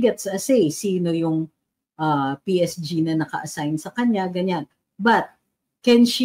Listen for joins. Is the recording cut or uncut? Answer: uncut